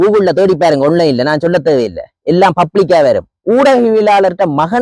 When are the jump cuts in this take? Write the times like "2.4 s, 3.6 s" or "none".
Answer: none